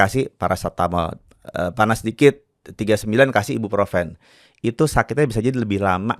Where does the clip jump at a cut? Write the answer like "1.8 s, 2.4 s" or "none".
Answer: none